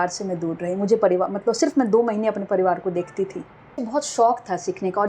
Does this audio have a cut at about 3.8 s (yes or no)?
yes